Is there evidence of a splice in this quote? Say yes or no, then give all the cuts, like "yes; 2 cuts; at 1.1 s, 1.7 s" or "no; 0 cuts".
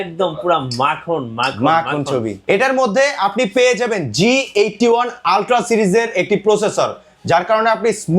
yes; 1 cut; at 2.4 s